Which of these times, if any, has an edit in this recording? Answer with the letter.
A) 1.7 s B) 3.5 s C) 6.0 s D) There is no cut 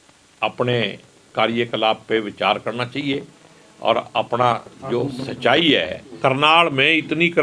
C